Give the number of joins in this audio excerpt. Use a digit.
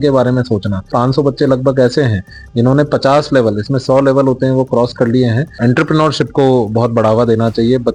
2